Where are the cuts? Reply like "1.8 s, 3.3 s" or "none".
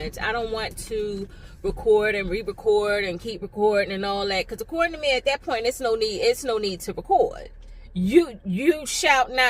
none

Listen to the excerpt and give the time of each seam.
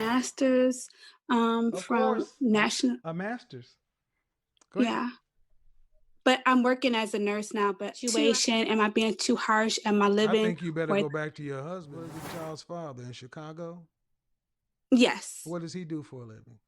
8.1 s, 11.9 s

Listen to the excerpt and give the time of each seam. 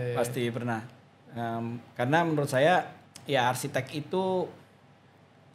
none

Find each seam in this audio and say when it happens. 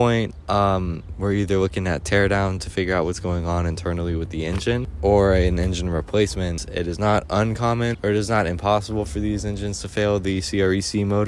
4.9 s, 6.6 s, 8.0 s

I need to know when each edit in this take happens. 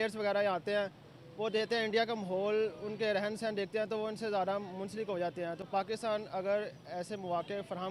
none

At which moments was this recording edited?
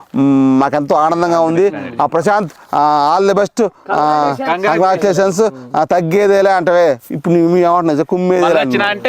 none

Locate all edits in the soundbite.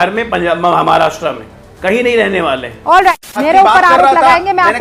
3.3 s

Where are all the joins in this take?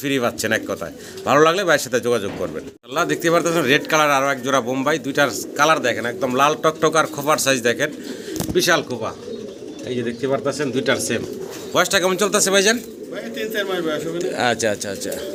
none

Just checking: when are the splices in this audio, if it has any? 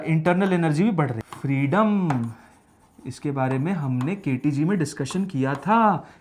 1.3 s

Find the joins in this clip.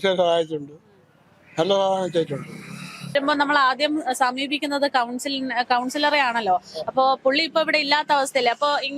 3.1 s

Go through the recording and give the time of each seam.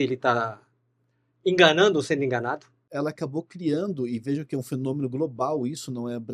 2.9 s

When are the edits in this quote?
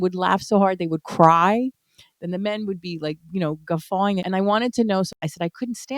4.2 s, 5.1 s

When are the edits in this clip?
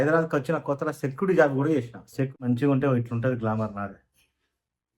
2.4 s

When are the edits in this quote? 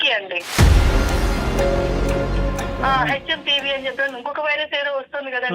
2.8 s

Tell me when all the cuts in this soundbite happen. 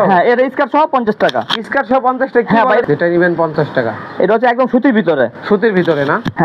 2.8 s

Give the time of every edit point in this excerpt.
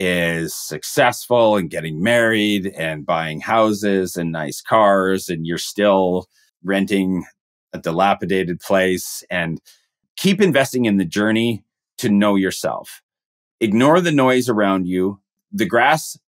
6.5 s, 10.0 s, 15.3 s

